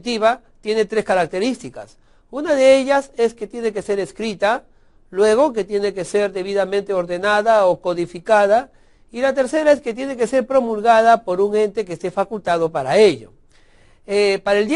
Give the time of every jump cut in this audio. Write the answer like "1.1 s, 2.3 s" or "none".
5.3 s